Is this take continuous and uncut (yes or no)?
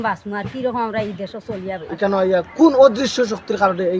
no